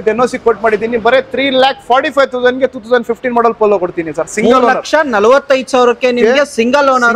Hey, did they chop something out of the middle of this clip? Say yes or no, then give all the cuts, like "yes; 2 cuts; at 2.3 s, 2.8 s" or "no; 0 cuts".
no; 0 cuts